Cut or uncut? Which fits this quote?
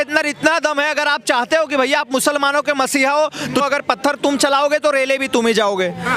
cut